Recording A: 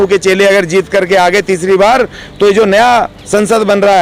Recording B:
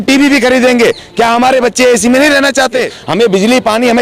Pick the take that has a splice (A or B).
B